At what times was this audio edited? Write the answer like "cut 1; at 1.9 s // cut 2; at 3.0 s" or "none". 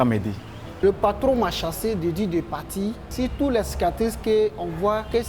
cut 1; at 0.8 s // cut 2; at 3.0 s